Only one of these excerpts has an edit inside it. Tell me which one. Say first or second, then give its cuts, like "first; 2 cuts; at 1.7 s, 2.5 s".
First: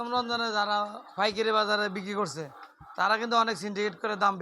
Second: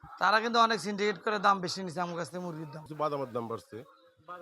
second; 1 cut; at 2.8 s